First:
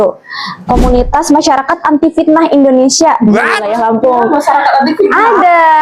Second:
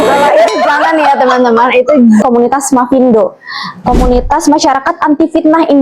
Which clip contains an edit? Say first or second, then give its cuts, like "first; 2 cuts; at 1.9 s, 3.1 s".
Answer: second; 1 cut; at 2.2 s